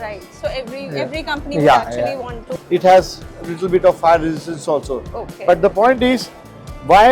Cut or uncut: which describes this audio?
cut